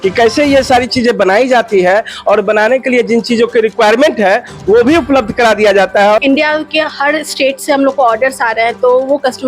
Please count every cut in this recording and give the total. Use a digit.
1